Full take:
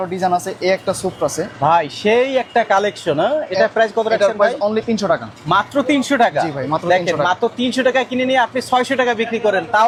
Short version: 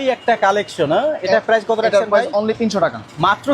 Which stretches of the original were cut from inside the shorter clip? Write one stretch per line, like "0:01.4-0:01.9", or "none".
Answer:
none